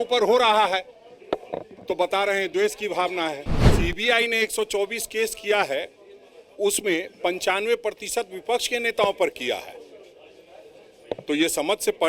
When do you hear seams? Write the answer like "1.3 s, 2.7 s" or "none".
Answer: 3.7 s